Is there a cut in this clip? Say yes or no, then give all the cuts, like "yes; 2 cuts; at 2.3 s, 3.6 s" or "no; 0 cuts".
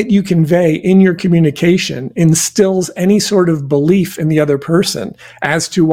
no; 0 cuts